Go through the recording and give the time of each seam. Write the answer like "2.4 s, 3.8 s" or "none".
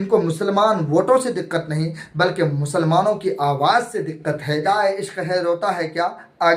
4.7 s